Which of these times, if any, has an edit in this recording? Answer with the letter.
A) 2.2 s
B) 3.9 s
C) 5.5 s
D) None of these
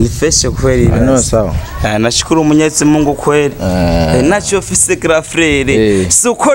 D